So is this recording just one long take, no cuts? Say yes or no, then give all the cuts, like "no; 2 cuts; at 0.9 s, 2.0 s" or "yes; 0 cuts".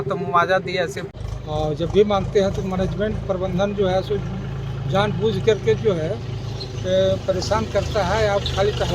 no; 1 cut; at 1.1 s